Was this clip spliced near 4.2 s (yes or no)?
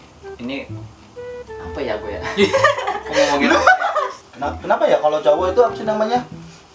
yes